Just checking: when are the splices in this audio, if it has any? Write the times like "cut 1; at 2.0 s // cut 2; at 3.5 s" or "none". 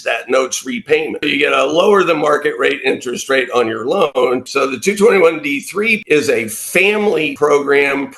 cut 1; at 1.3 s // cut 2; at 4.2 s // cut 3; at 6.0 s // cut 4; at 7.3 s